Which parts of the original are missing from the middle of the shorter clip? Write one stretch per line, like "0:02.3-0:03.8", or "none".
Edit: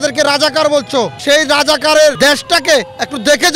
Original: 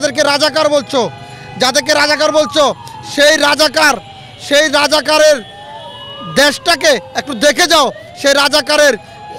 0:01.2-0:04.4
0:05.4-0:06.3